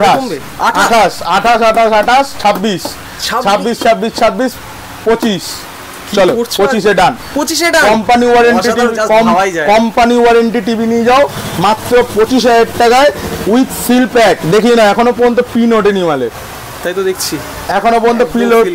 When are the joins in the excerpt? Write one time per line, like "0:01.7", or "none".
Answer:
none